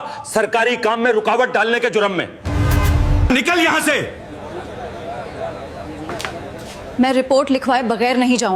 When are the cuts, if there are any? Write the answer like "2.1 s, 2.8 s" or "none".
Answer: none